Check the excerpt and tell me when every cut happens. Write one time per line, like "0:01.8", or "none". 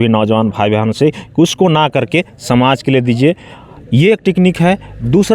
none